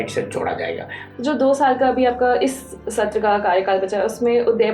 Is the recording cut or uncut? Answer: cut